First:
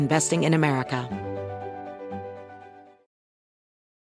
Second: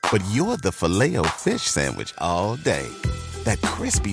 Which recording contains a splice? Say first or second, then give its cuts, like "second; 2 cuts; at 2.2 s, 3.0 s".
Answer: first; 1 cut; at 1.0 s